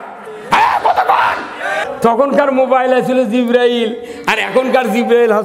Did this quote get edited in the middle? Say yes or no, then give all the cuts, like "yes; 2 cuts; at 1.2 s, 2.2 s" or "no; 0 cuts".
yes; 1 cut; at 1.9 s